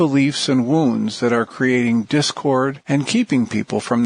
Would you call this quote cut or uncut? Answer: cut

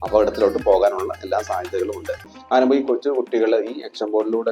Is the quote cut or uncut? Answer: cut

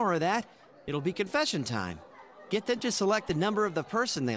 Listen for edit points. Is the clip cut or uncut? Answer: uncut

